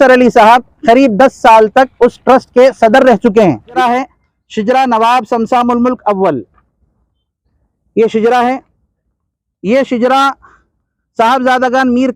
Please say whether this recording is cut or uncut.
cut